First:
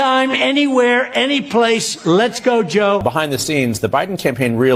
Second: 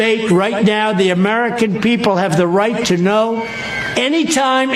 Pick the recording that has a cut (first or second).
first